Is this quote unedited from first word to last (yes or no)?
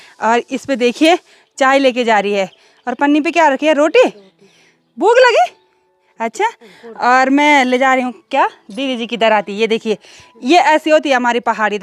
yes